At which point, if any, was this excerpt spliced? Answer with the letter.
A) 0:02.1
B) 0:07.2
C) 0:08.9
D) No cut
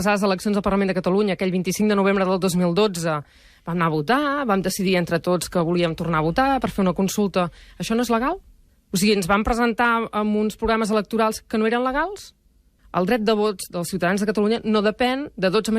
B